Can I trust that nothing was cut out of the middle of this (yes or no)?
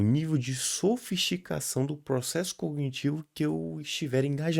yes